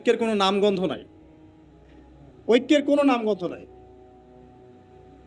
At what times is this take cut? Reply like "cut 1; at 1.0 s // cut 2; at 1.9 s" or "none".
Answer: cut 1; at 1.1 s // cut 2; at 2.4 s